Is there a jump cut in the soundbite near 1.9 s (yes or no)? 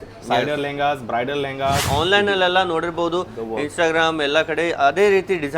yes